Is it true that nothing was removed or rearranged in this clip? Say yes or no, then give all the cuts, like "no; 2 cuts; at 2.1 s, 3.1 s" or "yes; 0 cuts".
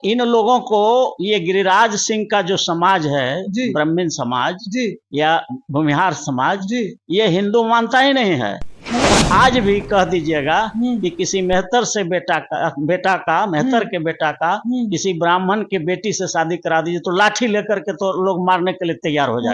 no; 1 cut; at 9.1 s